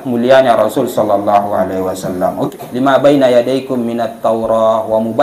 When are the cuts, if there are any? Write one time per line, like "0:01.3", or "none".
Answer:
0:02.5